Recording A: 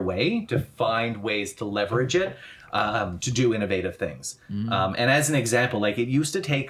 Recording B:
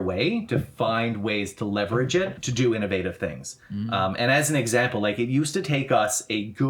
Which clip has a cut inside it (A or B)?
B